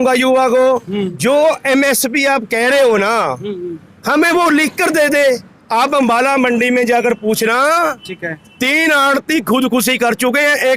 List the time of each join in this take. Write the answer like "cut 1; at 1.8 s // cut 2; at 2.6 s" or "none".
cut 1; at 1.1 s // cut 2; at 5.5 s

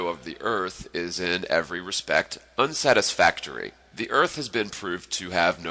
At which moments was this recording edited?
cut 1; at 3.1 s

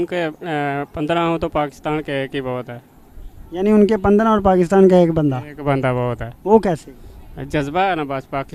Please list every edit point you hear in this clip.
none

